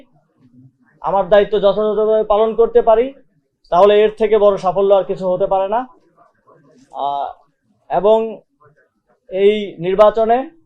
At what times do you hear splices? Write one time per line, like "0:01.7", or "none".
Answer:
none